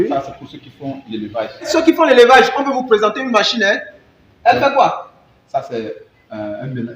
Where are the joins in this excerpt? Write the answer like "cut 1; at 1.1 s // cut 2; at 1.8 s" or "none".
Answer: none